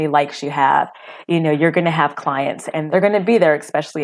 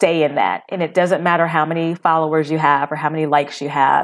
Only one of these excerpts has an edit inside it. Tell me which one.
first; 1 cut; at 2.8 s

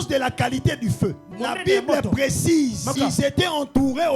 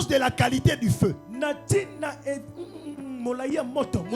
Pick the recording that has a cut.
first; 2 cuts; at 1.3 s, 2.9 s

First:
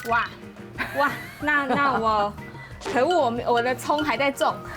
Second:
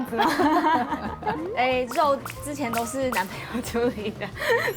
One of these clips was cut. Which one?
second; 1 cut; at 1.4 s

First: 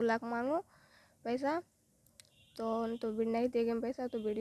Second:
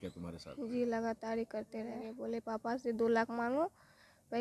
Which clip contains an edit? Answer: second; 1 cut; at 2.1 s

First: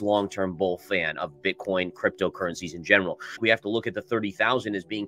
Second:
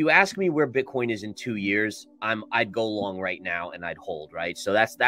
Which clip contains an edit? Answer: first; 1 cut; at 3.4 s

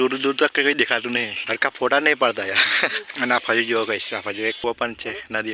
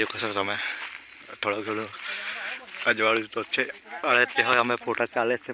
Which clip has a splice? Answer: first; 3 cuts; at 1.4 s, 3.0 s, 4.6 s

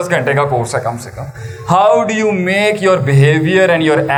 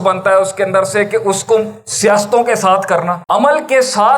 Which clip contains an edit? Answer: second; 1 cut; at 3.2 s

